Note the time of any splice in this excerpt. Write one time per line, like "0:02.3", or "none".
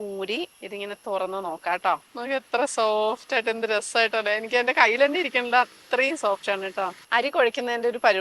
none